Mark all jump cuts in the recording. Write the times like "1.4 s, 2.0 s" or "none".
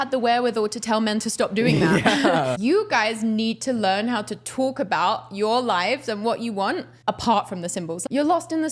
2.6 s, 6.9 s, 7.9 s